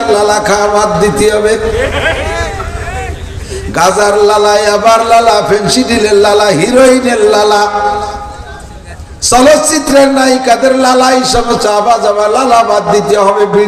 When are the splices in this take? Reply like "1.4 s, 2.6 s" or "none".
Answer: none